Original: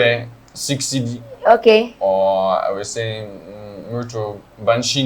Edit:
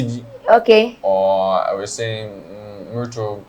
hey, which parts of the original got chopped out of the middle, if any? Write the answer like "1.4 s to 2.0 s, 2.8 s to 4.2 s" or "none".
none